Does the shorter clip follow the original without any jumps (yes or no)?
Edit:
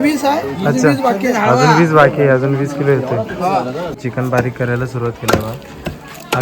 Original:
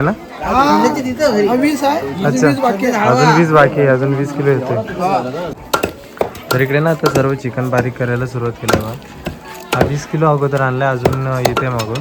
no